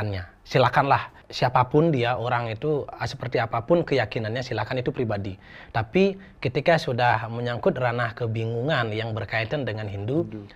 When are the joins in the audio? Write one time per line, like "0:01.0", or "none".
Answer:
0:01.2